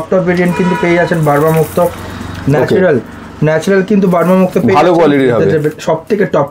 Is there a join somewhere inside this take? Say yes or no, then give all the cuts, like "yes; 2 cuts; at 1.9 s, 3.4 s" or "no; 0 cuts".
no; 0 cuts